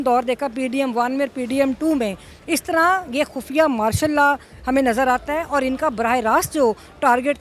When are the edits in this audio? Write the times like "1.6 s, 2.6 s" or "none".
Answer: none